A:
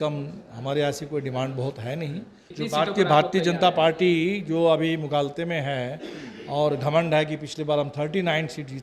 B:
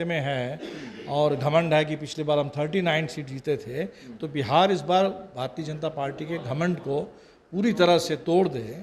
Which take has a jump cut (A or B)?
A